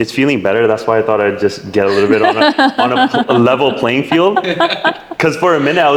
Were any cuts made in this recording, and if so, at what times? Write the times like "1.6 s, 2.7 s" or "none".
none